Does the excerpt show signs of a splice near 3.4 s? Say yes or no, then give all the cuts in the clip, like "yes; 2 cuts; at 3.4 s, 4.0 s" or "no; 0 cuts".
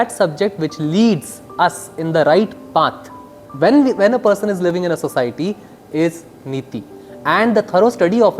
yes; 1 cut; at 3.4 s